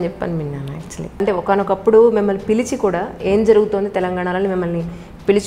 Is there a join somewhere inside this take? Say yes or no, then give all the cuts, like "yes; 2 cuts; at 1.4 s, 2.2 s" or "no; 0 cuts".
yes; 1 cut; at 1.2 s